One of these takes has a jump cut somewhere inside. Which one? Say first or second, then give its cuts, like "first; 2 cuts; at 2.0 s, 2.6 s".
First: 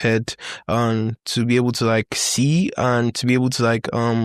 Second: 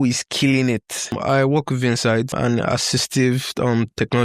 second; 2 cuts; at 1.2 s, 2.3 s